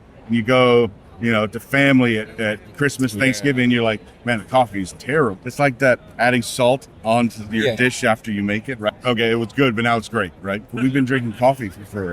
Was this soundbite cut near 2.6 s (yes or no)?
no